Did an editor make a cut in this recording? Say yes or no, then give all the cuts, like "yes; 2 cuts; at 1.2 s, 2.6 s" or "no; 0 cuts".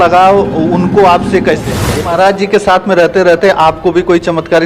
yes; 1 cut; at 1.8 s